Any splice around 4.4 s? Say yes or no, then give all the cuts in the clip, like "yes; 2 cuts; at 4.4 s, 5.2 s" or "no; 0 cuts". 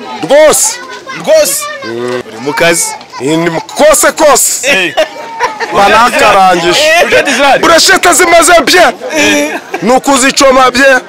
no; 1 cut; at 2.2 s